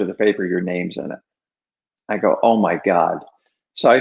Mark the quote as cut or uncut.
uncut